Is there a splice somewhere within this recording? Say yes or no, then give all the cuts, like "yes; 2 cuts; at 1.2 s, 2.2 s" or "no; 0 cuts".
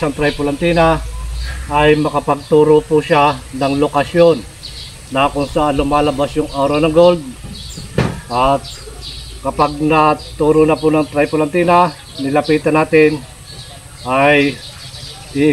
no; 0 cuts